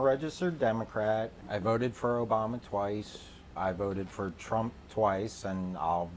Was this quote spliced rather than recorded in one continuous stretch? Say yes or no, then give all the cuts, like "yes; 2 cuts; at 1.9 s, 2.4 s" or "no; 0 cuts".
yes; 2 cuts; at 1.4 s, 3.6 s